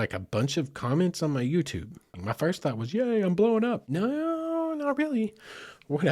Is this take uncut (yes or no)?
no